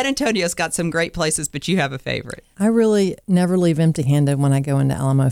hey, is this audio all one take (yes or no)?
no